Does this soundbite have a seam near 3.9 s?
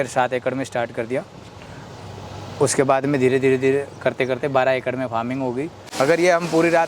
no; 1 cut; at 5.8 s

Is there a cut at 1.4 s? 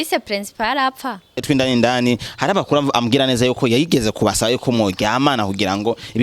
yes; 1 cut; at 1.4 s

